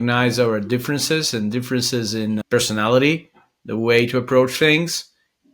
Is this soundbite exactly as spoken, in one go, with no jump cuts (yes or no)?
no